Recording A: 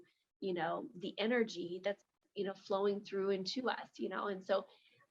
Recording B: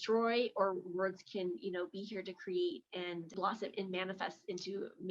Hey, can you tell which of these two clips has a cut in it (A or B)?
B